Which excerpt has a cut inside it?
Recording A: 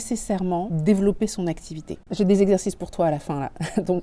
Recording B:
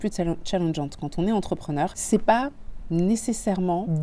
A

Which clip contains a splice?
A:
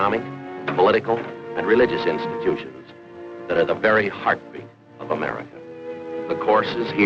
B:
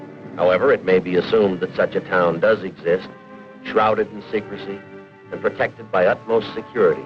B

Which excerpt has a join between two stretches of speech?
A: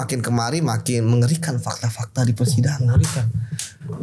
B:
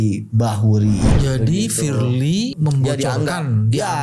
B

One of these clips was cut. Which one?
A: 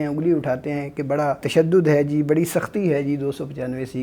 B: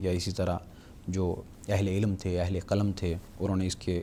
A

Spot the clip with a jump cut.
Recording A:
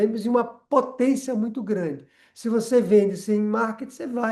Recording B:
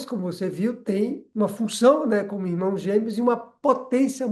B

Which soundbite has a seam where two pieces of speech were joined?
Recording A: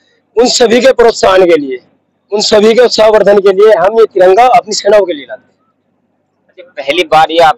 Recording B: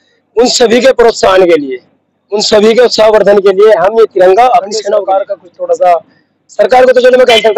B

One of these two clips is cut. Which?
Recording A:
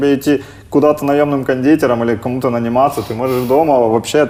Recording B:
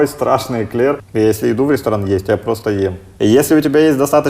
B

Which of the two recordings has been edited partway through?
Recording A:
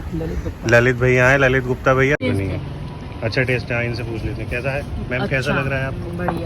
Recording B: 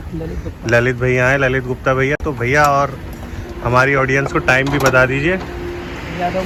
A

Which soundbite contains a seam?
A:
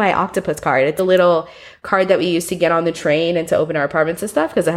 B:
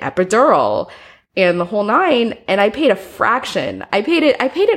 A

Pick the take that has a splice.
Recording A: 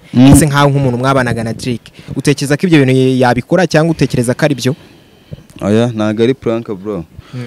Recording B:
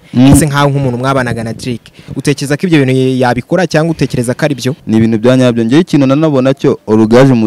B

